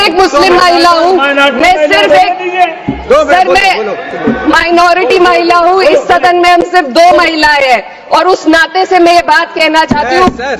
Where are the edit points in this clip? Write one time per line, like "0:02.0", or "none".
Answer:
none